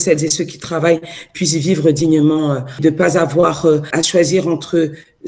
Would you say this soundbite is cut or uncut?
cut